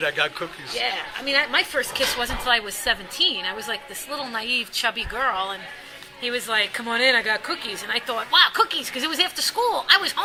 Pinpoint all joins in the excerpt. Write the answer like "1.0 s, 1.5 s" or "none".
none